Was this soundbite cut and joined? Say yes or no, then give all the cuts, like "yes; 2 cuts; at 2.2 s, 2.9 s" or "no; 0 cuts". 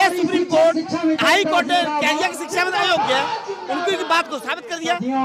no; 0 cuts